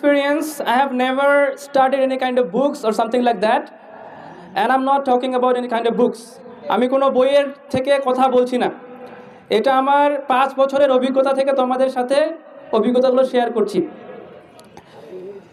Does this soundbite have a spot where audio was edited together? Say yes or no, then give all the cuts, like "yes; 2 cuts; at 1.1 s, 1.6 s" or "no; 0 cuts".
no; 0 cuts